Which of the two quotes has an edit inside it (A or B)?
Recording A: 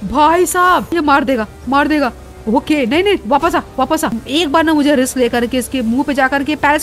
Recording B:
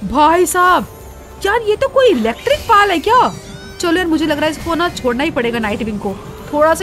A